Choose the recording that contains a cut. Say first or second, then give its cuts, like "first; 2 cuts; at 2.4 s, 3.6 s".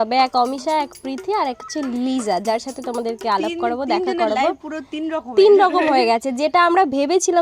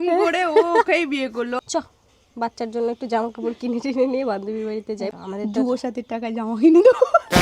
second; 2 cuts; at 1.6 s, 5.1 s